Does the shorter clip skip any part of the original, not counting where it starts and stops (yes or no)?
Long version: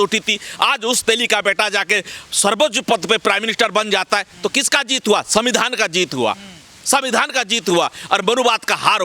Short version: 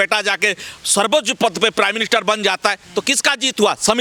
no